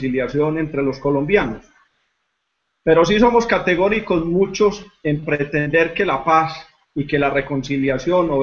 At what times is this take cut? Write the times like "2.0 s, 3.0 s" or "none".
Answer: 7.2 s